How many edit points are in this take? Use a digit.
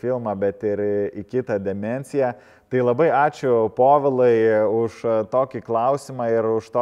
0